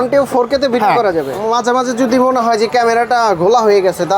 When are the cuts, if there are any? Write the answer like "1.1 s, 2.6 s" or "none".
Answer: 1.4 s